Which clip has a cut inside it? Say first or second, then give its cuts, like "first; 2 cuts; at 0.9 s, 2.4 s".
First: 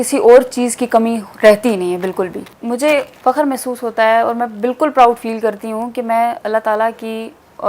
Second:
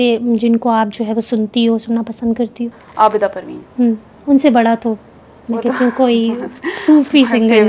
first; 1 cut; at 2.8 s